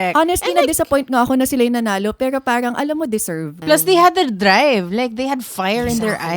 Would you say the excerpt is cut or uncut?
cut